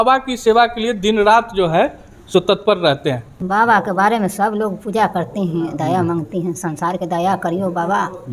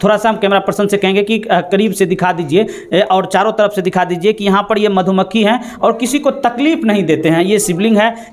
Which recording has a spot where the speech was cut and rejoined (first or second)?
first